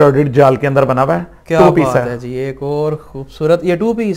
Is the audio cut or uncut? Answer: uncut